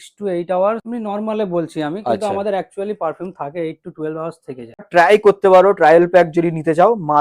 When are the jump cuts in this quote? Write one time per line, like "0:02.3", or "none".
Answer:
0:00.8
0:04.8